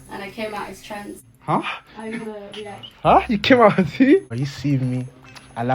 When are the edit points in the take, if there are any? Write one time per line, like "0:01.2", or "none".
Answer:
0:04.3